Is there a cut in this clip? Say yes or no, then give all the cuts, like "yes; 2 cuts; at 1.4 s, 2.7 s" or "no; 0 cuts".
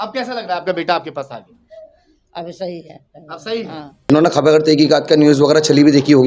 yes; 1 cut; at 3.9 s